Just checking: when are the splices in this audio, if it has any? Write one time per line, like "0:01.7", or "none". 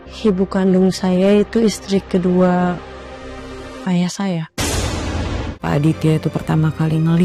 0:05.6